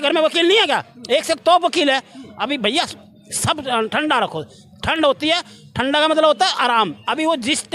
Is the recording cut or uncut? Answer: uncut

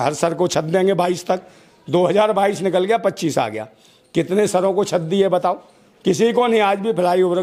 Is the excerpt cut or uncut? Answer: uncut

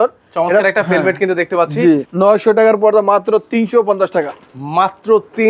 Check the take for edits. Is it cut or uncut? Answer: cut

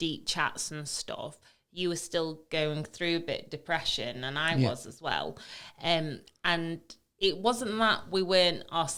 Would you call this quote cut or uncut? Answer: uncut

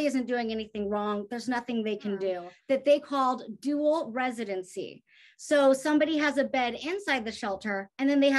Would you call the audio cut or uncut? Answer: cut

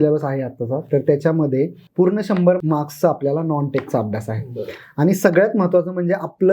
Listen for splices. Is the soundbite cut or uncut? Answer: cut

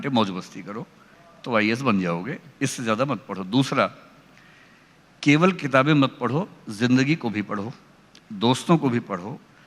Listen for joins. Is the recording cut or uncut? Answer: uncut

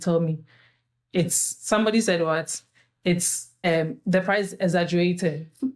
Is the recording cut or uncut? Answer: cut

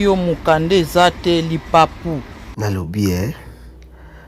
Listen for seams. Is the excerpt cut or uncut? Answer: cut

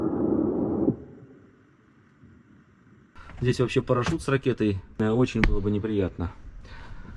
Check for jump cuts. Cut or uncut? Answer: cut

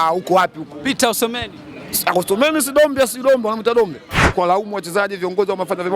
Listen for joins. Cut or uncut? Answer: cut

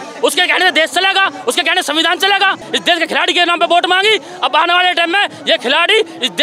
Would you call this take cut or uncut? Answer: cut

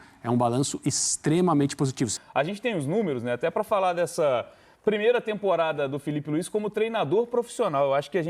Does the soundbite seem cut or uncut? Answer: cut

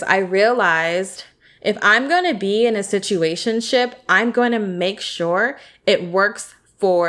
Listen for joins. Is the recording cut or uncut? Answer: uncut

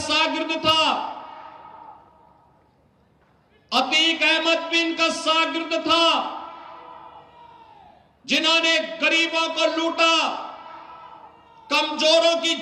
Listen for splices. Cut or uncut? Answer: uncut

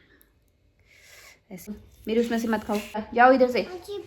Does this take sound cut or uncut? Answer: cut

